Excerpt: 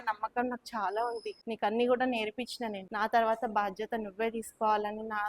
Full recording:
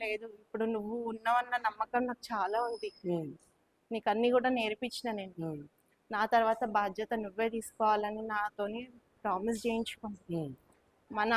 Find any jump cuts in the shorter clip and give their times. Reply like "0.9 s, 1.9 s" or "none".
1.3 s, 2.8 s